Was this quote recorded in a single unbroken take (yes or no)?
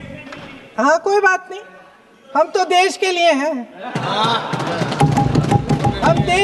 yes